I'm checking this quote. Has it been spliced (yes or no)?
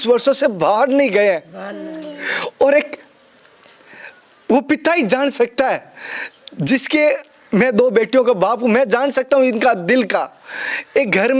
no